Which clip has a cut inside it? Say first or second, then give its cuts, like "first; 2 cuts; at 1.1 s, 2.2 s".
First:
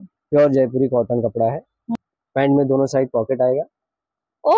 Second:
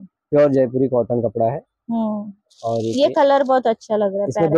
first; 1 cut; at 1.8 s